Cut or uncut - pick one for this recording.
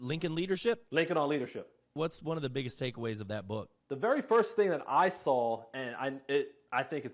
cut